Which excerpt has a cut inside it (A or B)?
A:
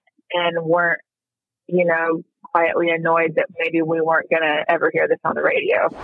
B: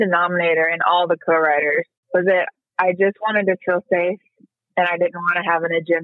B